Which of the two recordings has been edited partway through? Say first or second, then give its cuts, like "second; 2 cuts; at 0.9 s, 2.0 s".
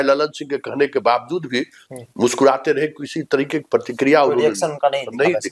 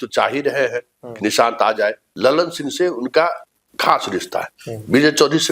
second; 1 cut; at 2.0 s